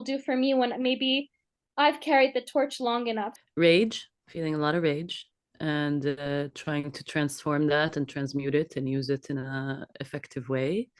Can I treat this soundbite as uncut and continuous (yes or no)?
no